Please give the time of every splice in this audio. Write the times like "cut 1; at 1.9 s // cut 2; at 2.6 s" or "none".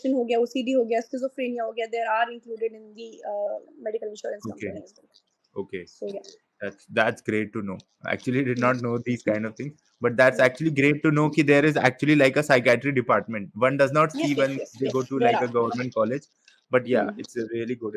none